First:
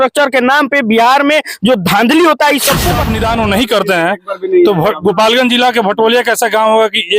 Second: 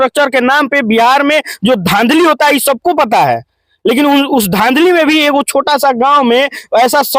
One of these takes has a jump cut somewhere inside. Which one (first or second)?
first